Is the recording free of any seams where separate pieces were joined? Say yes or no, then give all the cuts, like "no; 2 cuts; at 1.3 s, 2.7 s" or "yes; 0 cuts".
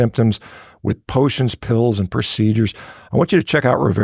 yes; 0 cuts